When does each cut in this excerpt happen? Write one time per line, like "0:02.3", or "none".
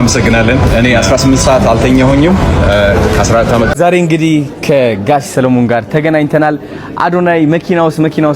0:03.7